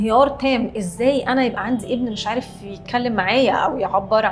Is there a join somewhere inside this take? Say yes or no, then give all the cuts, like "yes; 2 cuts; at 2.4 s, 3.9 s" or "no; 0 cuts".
no; 0 cuts